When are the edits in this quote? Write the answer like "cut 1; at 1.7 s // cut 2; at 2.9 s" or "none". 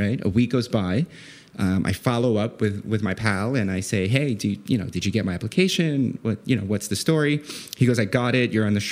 none